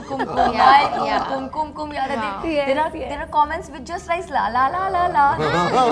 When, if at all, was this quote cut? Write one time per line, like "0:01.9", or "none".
none